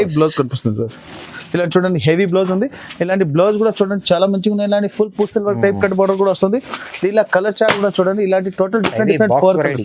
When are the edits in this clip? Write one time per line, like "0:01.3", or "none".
none